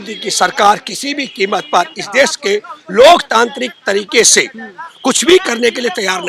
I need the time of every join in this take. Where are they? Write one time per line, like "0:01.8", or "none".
none